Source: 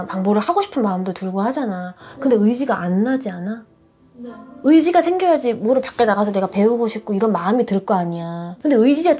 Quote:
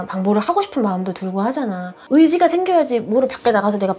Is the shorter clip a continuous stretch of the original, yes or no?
no